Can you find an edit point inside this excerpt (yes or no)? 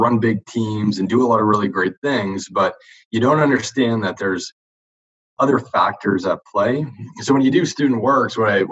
no